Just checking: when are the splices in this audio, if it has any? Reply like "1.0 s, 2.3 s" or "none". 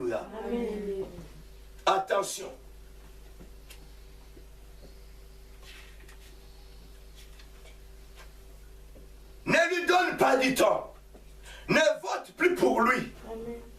none